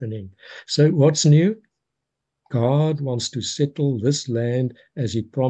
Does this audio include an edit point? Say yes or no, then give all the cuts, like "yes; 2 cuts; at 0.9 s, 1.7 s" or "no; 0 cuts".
no; 0 cuts